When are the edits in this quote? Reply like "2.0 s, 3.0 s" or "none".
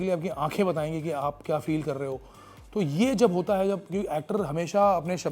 none